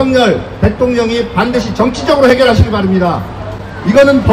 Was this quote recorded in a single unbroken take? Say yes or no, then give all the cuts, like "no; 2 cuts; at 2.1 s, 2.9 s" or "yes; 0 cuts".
yes; 0 cuts